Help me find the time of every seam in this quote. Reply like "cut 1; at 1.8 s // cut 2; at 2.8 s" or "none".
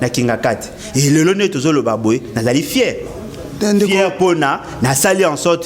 none